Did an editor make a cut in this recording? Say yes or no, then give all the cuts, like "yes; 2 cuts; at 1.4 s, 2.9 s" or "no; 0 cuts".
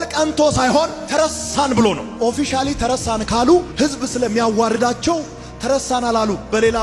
no; 0 cuts